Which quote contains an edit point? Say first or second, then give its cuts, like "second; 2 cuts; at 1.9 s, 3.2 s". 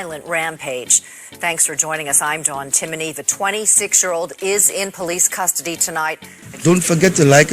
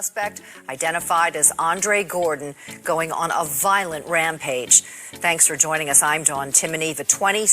first; 1 cut; at 6.4 s